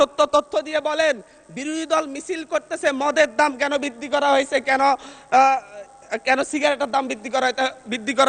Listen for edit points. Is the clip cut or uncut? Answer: uncut